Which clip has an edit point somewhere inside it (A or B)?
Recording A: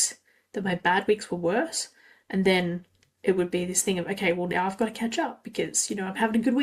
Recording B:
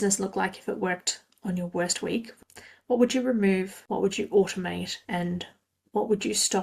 B